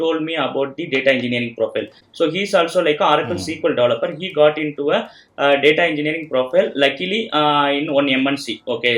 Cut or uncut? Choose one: uncut